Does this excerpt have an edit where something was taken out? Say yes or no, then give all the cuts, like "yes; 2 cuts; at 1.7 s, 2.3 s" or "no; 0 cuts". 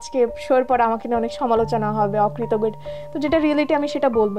no; 0 cuts